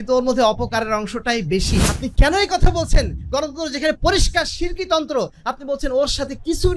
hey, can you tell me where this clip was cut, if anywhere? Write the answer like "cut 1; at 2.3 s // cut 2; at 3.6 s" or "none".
cut 1; at 1.9 s